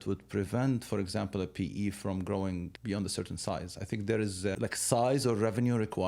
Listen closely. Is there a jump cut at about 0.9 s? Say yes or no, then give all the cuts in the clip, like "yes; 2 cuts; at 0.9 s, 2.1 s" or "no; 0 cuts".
no; 2 cuts; at 2.7 s, 4.6 s